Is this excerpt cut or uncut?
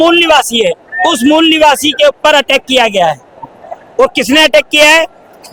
uncut